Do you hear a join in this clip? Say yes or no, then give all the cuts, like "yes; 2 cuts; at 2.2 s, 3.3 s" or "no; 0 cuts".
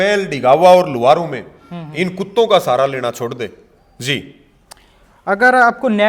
no; 0 cuts